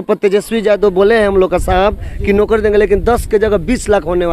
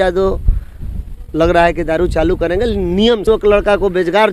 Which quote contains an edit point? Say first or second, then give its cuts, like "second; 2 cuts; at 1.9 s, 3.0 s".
second; 1 cut; at 3.2 s